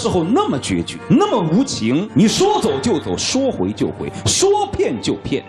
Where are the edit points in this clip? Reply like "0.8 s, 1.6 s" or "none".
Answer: 0.9 s, 2.1 s